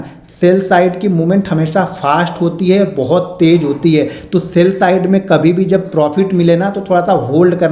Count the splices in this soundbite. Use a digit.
0